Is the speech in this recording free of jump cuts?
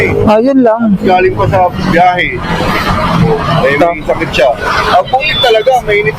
yes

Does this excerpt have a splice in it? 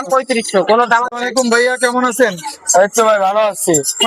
yes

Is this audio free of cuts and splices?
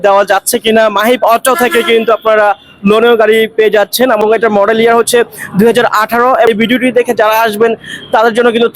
no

